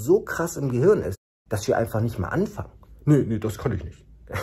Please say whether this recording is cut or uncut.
uncut